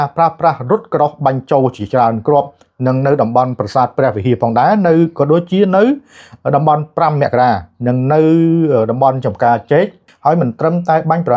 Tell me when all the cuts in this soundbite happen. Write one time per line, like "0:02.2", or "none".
0:10.0